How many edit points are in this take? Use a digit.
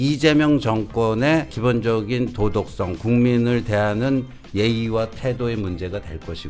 1